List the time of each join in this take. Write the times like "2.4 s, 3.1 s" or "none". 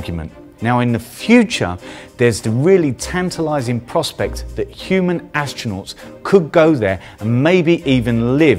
3.7 s